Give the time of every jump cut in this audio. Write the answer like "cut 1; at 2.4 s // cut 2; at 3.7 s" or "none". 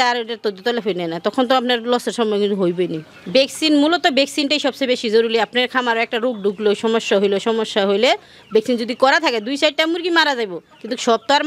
cut 1; at 3.2 s

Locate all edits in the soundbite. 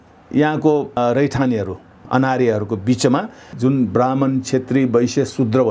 cut 1; at 1.0 s // cut 2; at 2.0 s // cut 3; at 3.5 s

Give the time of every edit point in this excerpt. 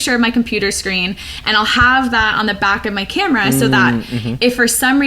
none

